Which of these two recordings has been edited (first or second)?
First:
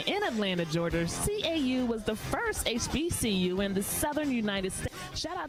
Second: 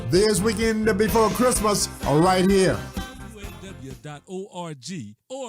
second